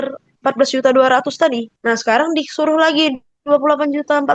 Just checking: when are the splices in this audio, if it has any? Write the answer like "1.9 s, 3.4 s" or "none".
1.7 s